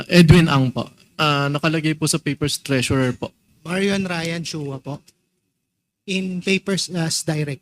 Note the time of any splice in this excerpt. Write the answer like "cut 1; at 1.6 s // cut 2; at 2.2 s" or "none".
cut 1; at 1.2 s // cut 2; at 3.5 s

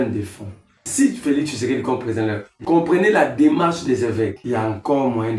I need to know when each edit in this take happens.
cut 1; at 0.9 s // cut 2; at 2.5 s // cut 3; at 4.4 s

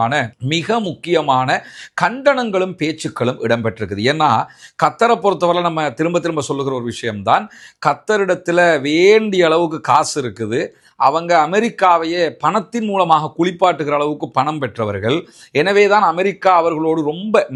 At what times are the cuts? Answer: none

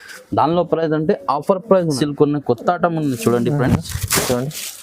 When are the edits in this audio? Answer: cut 1; at 1.9 s

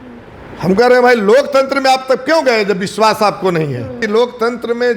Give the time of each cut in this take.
cut 1; at 4.0 s

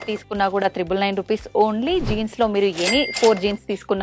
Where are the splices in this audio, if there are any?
none

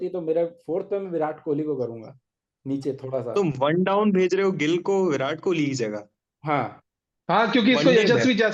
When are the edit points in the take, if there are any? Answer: none

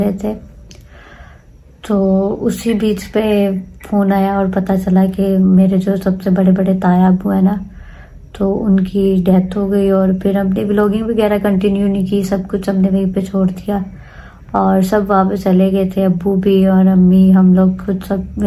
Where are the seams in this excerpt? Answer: none

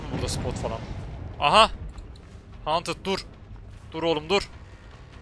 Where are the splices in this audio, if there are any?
none

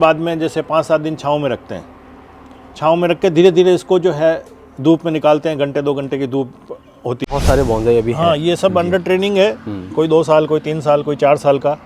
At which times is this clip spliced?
cut 1; at 7.2 s

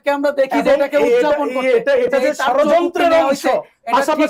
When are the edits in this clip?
none

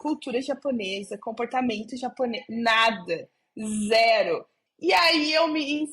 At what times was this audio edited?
cut 1; at 4.6 s

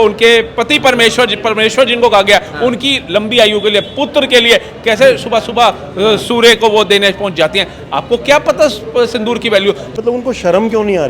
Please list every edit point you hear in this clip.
cut 1; at 9.9 s

